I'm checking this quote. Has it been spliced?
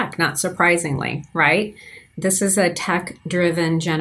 no; 0 cuts

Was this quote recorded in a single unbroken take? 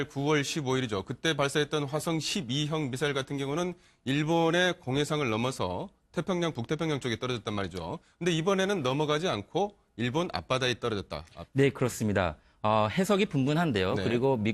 no; 1 cut; at 2.2 s

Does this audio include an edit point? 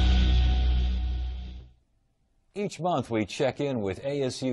no; 0 cuts

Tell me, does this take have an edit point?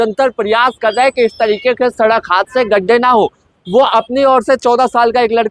no; 0 cuts

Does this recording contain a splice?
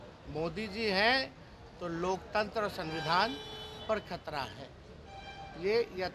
no; 0 cuts

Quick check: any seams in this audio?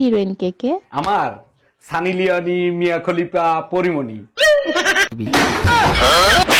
no; 0 cuts

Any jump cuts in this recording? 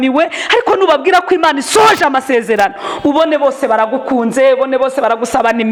no; 0 cuts

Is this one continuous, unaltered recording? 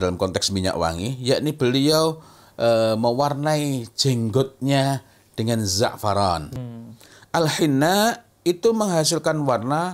no; 1 cut; at 6.5 s

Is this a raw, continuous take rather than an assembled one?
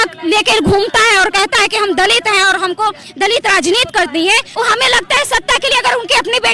no; 1 cut; at 4.5 s

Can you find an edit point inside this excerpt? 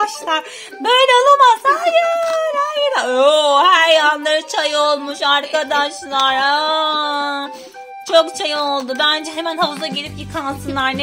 no; 0 cuts

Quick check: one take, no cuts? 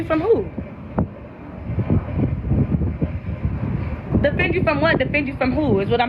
yes; 0 cuts

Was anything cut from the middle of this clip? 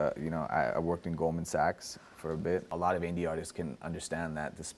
yes; 1 cut; at 2.7 s

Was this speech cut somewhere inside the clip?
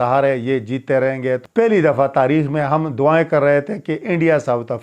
yes; 1 cut; at 1.4 s

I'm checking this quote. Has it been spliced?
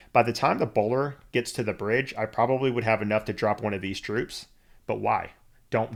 no; 0 cuts

